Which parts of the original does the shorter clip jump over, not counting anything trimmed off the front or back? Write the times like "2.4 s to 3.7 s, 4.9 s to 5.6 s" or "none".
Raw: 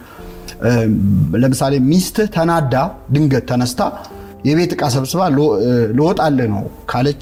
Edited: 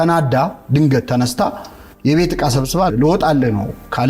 5.3 s to 5.9 s